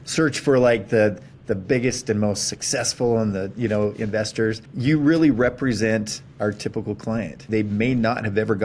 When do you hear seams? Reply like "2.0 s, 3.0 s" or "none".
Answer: 4.7 s, 7.5 s